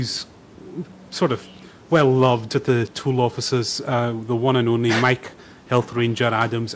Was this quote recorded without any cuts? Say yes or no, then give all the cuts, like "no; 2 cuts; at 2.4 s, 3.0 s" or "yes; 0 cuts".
yes; 0 cuts